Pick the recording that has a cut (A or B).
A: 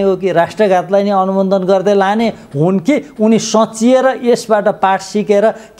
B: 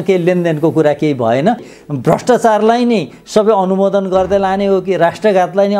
B